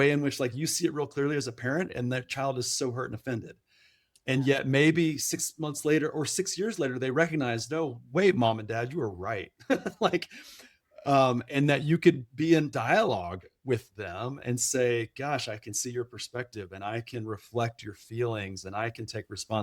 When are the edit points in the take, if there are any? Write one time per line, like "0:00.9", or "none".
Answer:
none

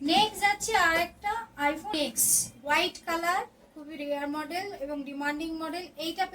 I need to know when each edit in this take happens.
0:01.9

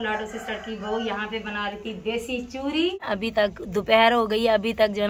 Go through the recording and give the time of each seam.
0:03.1

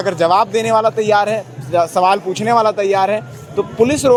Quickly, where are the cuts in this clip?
none

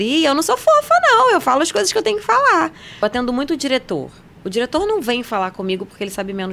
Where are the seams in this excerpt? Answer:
0:02.9

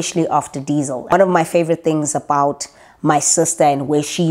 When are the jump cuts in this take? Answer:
0:01.1

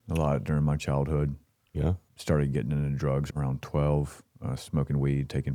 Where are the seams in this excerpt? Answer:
0:02.1
0:03.3

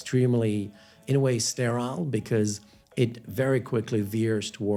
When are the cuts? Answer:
none

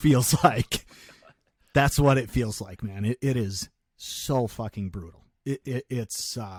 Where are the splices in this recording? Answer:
none

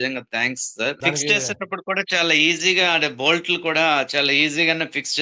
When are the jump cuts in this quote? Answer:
0:01.0

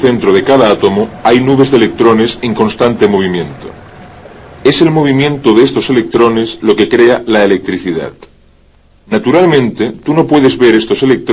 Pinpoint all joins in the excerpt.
0:01.1

